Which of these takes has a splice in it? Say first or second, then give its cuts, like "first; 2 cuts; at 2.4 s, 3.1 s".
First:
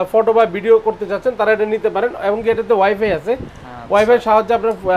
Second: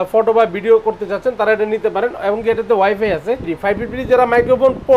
second; 1 cut; at 3.5 s